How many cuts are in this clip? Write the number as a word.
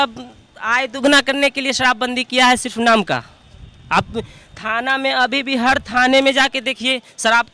zero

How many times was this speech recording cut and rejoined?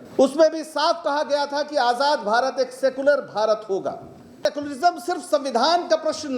one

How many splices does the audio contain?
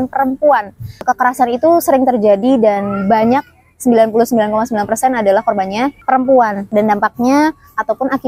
two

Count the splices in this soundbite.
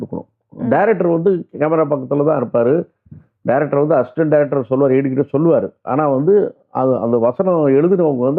zero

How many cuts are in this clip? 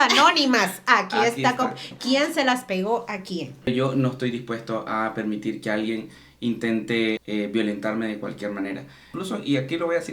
three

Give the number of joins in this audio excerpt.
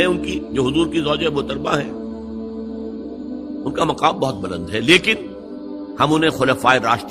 two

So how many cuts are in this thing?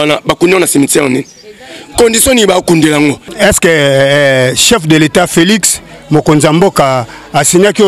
one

